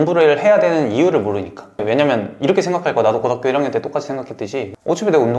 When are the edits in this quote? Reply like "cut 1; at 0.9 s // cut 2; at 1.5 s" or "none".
cut 1; at 1.8 s